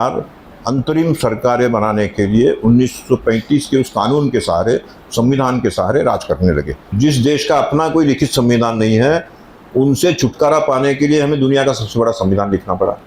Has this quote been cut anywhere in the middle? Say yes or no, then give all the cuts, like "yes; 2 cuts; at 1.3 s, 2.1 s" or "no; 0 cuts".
yes; 1 cut; at 6.9 s